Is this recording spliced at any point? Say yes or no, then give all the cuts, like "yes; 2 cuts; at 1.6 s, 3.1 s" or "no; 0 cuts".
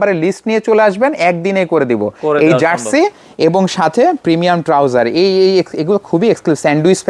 no; 0 cuts